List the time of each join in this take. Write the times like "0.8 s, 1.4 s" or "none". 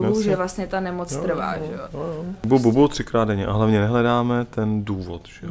2.4 s